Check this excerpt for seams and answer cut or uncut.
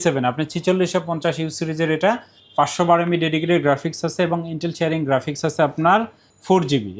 uncut